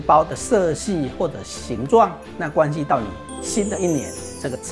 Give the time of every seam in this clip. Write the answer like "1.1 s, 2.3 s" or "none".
none